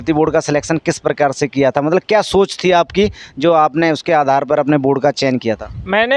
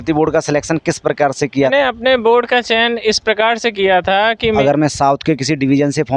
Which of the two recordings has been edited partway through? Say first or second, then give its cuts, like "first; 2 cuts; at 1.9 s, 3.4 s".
second; 2 cuts; at 1.7 s, 4.6 s